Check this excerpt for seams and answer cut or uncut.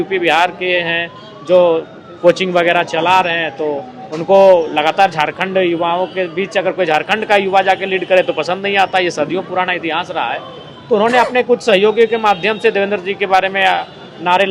uncut